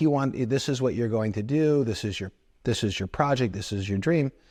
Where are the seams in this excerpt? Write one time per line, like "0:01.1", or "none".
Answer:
none

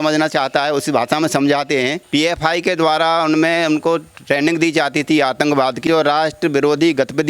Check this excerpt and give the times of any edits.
0:02.0
0:05.8

